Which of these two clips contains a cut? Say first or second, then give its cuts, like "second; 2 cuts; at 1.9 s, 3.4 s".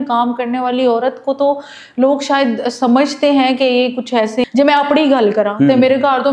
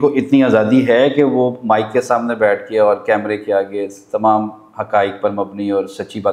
first; 1 cut; at 4.4 s